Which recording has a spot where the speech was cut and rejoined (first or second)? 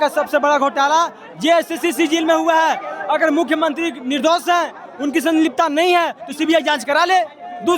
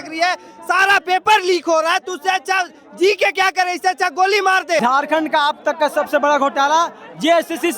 second